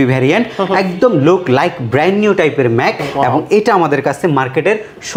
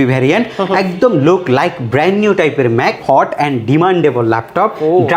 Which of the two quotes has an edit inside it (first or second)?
second